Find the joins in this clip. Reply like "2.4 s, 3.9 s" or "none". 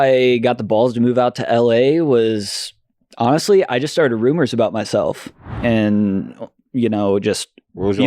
5.5 s